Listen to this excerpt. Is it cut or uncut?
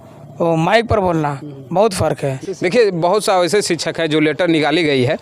cut